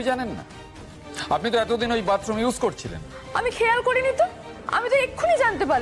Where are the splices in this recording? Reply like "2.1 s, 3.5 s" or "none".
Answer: none